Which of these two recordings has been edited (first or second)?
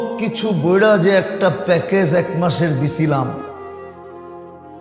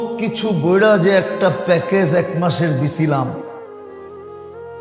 second